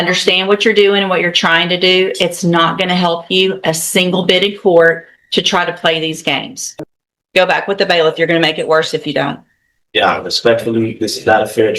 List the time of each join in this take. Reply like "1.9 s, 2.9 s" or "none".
6.6 s